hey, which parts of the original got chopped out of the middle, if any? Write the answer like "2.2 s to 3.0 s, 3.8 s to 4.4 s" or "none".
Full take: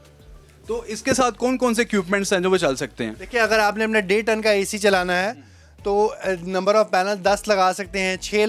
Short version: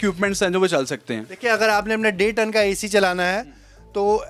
none